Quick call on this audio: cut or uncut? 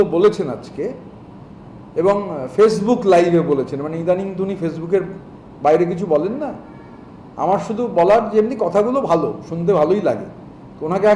uncut